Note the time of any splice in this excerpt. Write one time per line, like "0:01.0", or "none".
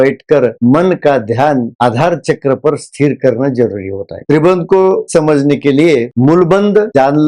0:04.2
0:05.1
0:06.1